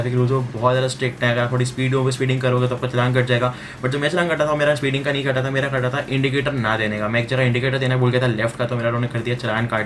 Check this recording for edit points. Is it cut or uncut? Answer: uncut